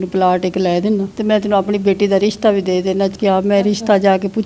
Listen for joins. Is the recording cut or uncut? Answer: cut